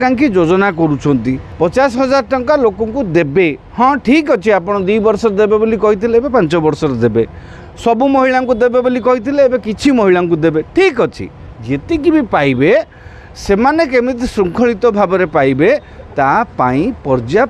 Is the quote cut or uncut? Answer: cut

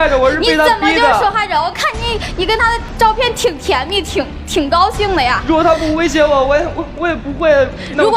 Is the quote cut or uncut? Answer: uncut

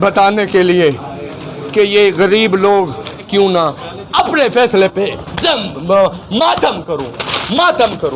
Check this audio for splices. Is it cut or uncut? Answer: cut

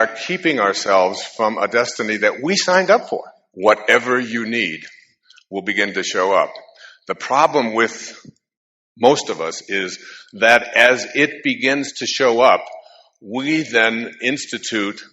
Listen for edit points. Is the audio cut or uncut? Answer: cut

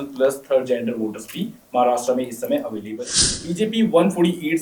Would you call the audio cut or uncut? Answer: cut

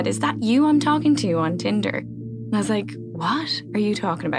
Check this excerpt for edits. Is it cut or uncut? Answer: uncut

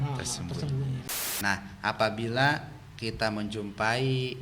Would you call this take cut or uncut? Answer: cut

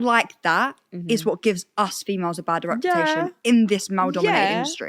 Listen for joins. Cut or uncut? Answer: uncut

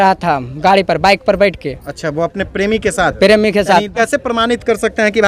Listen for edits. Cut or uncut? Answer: cut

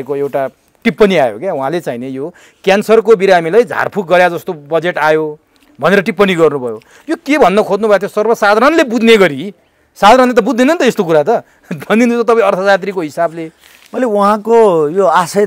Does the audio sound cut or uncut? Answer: uncut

